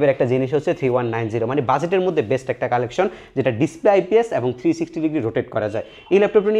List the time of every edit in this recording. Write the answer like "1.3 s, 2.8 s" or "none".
none